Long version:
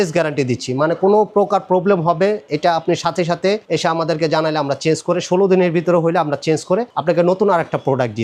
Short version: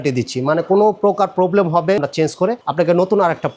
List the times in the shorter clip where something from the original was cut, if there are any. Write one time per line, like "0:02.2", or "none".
0:02.0